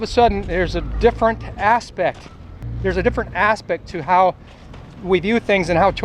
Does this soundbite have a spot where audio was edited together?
no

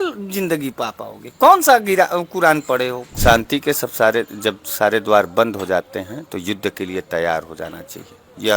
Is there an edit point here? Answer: yes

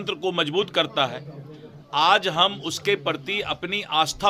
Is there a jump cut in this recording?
no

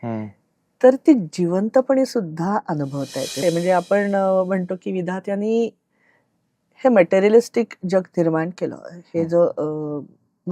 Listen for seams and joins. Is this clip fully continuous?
no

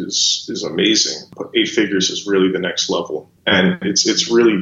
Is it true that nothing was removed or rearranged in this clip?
no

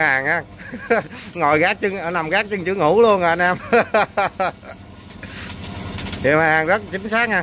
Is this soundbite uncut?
yes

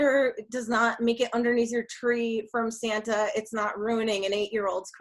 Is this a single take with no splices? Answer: yes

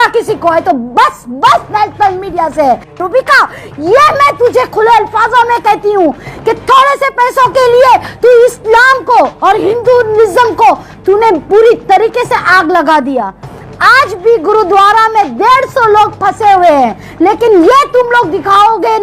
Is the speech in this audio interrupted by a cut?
yes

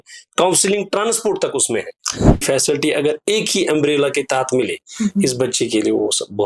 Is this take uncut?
no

